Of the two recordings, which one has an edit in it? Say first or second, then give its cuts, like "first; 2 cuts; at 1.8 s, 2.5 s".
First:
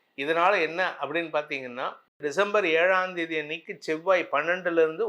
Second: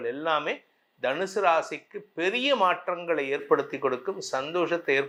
first; 1 cut; at 2.1 s